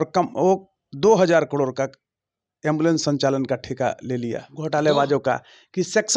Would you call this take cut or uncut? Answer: cut